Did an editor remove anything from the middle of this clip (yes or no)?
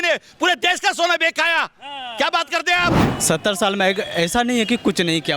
yes